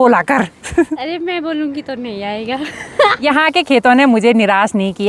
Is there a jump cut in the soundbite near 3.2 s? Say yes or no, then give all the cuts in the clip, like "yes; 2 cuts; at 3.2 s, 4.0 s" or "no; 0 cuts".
yes; 1 cut; at 3.2 s